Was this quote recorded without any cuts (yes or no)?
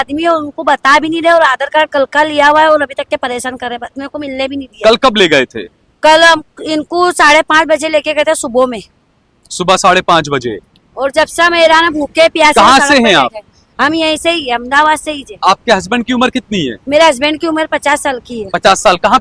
yes